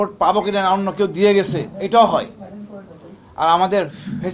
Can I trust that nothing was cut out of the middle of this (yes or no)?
yes